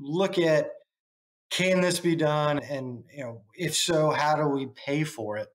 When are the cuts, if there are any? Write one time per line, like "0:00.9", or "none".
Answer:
0:02.6